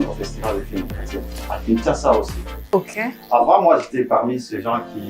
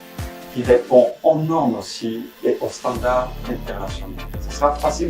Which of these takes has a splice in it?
first; 1 cut; at 2.6 s

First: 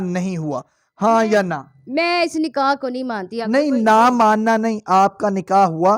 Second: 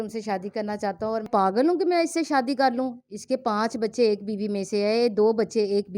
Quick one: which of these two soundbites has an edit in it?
second; 1 cut; at 1.3 s

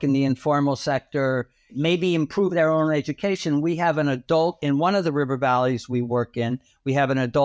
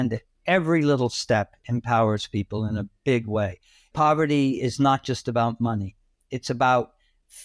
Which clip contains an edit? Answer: first; 1 cut; at 1.7 s

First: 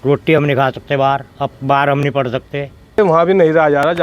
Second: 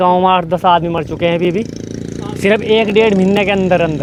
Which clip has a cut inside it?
first; 1 cut; at 3.0 s

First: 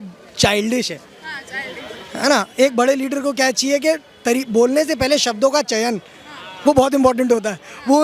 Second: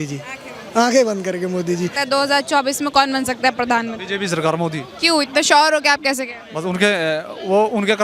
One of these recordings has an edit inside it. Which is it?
second; 1 cut; at 2.0 s

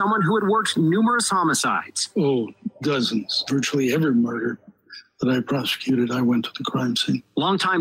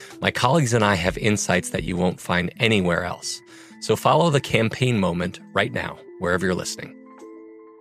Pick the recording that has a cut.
first; 1 cut; at 2.6 s

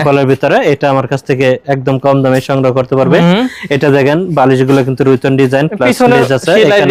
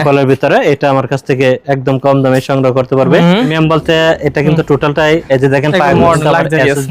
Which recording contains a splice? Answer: second; 1 cut; at 3.5 s

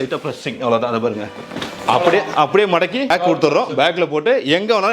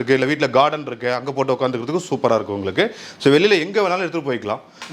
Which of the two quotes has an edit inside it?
first; 1 cut; at 3.1 s

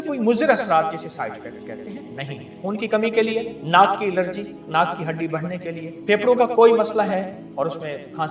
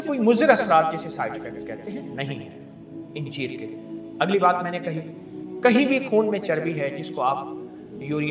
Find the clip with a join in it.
first; 5 cuts; at 2.6 s, 3.6 s, 4.6 s, 5.9 s, 7.4 s

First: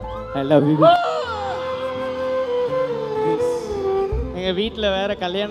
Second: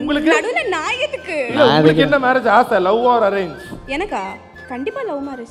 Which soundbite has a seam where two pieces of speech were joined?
first; 1 cut; at 4.3 s

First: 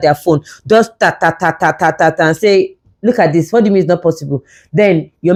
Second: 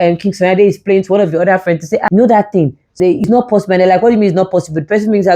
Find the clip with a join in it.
second; 1 cut; at 3.2 s

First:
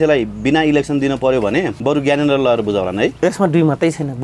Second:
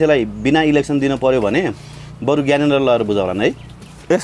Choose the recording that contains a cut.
first; 2 cuts; at 1.7 s, 3.1 s

